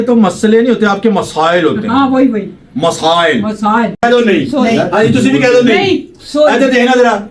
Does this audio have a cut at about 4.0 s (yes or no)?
yes